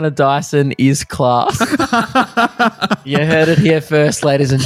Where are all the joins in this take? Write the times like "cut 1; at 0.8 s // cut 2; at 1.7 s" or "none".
none